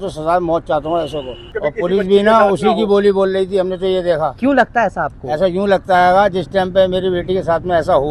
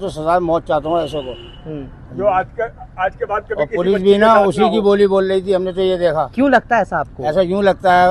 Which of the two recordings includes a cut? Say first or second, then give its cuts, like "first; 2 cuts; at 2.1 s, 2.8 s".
first; 1 cut; at 1.5 s